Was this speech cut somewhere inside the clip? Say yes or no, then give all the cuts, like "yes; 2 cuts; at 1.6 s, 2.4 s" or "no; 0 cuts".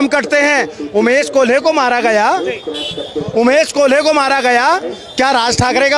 no; 0 cuts